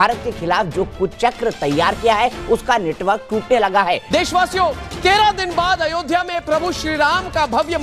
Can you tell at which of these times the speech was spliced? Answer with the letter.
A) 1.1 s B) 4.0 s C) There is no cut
B